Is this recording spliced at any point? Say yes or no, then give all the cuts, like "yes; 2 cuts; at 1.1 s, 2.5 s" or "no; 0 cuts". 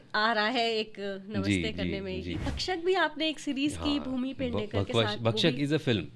yes; 1 cut; at 2.6 s